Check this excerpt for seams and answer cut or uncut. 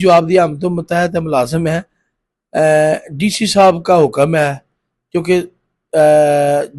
uncut